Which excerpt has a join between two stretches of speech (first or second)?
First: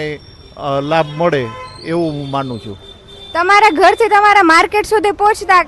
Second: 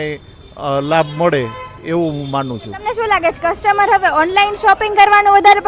second